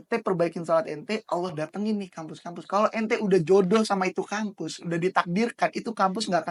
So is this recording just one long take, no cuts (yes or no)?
yes